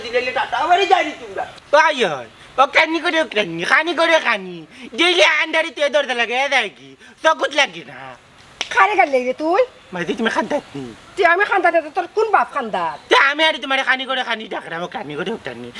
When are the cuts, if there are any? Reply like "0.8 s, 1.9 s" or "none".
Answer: none